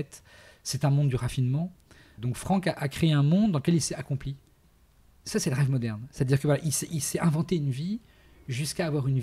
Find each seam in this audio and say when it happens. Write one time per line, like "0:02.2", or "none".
0:02.1
0:04.7